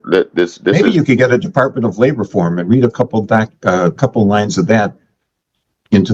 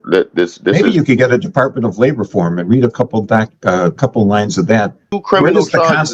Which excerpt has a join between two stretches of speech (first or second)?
second